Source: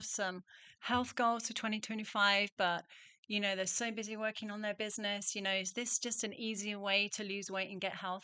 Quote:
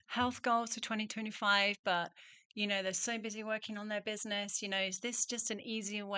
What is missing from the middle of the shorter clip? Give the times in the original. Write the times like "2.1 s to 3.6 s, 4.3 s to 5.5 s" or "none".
none